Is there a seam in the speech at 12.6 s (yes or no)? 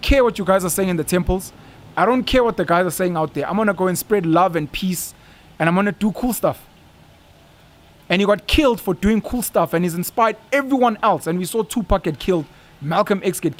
no